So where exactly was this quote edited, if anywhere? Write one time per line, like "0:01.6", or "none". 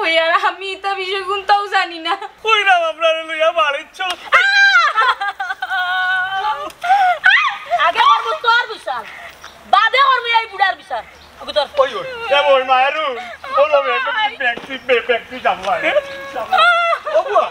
0:02.2